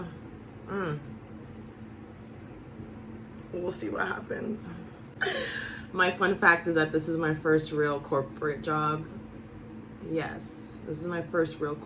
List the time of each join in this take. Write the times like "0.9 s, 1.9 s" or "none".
5.0 s